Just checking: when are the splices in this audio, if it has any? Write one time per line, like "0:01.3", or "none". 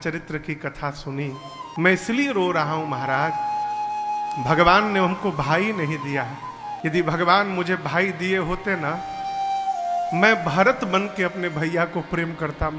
0:01.7
0:06.7